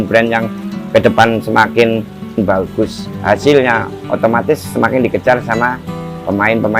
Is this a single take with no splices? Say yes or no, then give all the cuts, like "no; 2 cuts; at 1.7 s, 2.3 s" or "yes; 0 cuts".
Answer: no; 1 cut; at 2.4 s